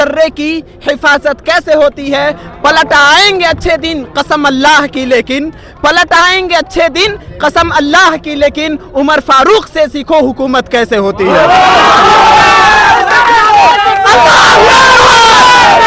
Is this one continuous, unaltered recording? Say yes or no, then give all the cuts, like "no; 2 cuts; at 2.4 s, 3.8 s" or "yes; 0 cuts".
yes; 0 cuts